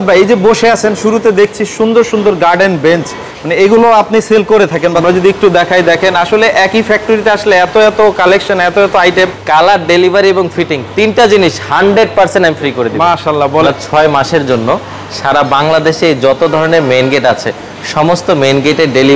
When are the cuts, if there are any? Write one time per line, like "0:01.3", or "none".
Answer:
0:04.9
0:09.4
0:13.6